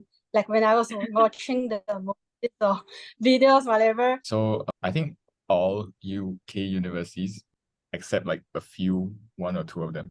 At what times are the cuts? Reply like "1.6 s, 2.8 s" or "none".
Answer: 4.4 s, 7.4 s